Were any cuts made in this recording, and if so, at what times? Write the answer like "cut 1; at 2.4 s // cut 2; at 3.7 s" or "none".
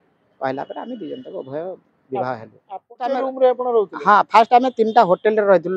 cut 1; at 3.0 s